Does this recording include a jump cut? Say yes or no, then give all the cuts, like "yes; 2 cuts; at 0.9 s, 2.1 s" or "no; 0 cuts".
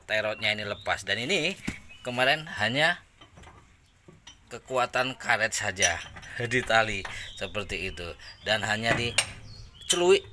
no; 0 cuts